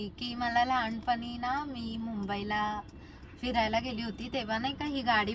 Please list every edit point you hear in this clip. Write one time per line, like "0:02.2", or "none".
none